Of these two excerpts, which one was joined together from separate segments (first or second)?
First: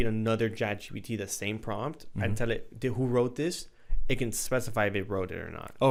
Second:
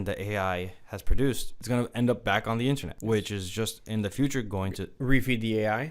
second